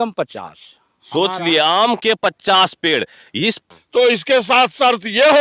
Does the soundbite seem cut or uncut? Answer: cut